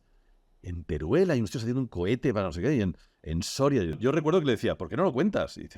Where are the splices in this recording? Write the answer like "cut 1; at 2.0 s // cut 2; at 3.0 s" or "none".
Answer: cut 1; at 4.0 s